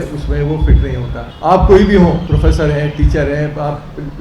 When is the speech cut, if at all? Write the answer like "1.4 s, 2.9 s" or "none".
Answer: 1.2 s, 2.2 s